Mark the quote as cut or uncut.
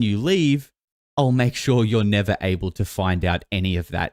uncut